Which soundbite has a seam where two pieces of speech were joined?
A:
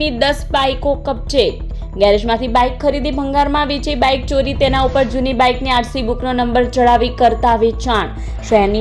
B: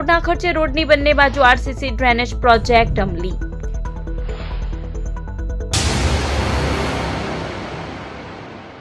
B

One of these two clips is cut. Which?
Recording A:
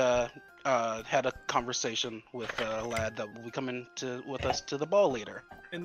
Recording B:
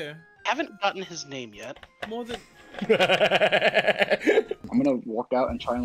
B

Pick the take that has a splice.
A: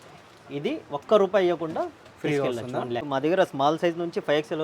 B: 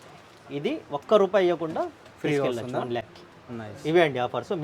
A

